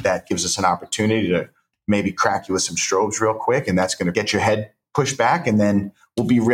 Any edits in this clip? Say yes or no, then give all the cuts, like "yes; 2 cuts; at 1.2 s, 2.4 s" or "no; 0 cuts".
yes; 1 cut; at 4.1 s